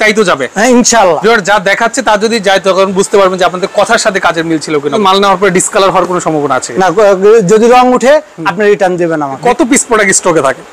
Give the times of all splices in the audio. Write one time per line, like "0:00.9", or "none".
0:01.2
0:05.0
0:09.4